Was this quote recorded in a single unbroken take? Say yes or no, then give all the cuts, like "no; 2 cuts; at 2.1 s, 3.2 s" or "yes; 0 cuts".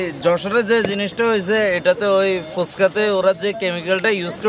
yes; 0 cuts